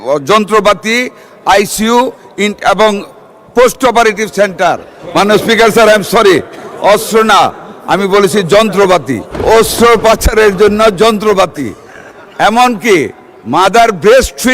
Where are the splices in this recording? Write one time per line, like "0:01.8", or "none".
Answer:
0:04.9
0:09.3